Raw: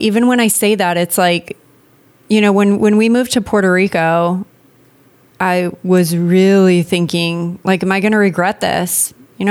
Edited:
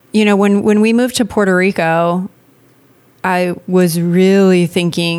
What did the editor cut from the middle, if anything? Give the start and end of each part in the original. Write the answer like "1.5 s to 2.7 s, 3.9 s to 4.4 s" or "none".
none